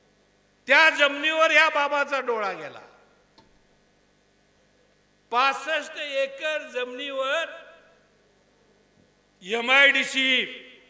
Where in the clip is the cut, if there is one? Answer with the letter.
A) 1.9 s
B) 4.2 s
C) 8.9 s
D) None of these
D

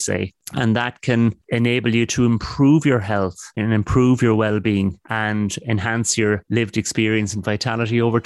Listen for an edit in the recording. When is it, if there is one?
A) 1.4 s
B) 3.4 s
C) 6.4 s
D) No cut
A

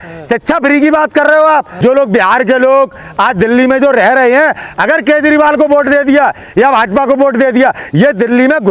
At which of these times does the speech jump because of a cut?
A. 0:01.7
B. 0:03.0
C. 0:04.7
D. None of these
A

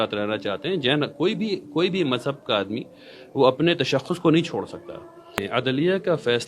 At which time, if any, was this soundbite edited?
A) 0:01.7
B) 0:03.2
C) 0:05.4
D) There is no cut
C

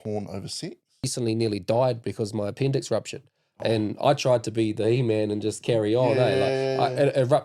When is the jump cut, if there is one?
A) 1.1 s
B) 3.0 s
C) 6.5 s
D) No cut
A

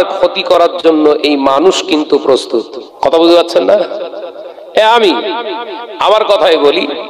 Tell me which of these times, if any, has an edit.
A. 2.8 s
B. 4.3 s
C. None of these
A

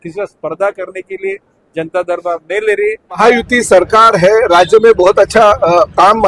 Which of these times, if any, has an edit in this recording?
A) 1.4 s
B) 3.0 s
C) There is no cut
B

